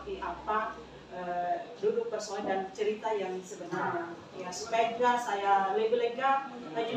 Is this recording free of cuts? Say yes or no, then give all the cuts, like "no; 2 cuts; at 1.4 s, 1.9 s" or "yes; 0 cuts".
yes; 0 cuts